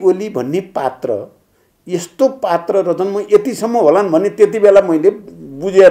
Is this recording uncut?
yes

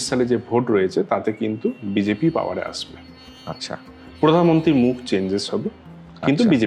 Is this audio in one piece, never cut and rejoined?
yes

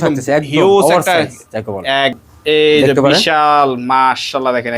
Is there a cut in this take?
yes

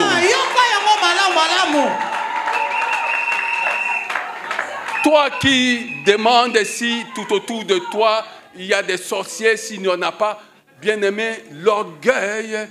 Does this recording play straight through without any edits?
yes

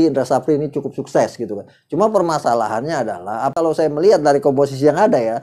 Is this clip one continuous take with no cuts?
no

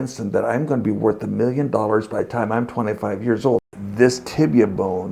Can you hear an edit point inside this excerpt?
yes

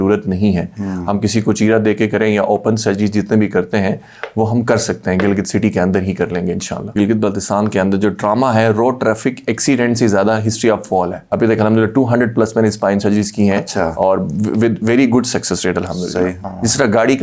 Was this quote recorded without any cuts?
no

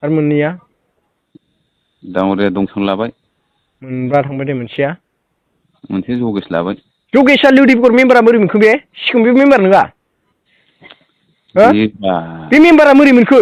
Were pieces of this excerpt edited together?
no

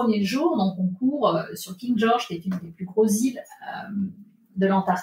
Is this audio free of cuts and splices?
yes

